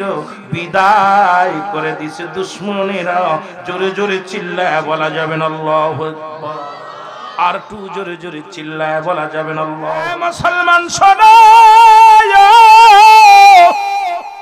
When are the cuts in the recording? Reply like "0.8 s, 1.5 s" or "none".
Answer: 10.3 s